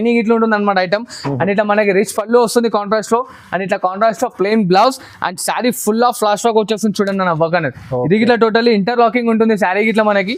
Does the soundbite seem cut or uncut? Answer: uncut